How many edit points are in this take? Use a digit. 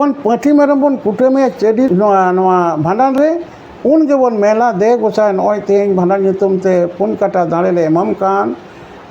1